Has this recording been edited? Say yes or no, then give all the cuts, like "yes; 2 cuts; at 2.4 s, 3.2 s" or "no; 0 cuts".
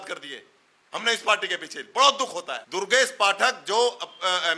yes; 1 cut; at 2.6 s